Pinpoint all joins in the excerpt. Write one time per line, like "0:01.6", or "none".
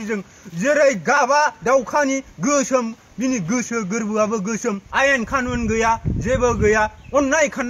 0:04.8